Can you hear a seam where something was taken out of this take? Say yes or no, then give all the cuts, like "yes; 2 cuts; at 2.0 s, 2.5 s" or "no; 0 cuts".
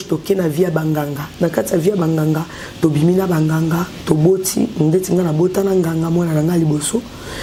no; 0 cuts